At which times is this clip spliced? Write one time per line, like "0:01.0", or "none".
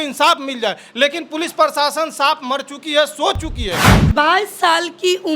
0:03.9